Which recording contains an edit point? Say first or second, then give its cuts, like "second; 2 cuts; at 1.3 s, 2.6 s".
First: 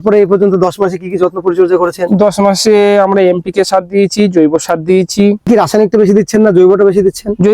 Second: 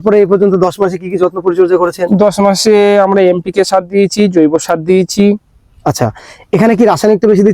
first; 1 cut; at 5.5 s